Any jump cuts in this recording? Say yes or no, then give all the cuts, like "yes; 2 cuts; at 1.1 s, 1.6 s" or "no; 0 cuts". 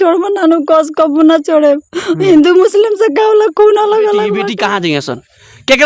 yes; 1 cut; at 4.5 s